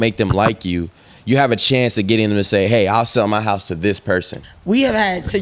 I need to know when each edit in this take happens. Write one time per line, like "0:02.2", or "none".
0:04.4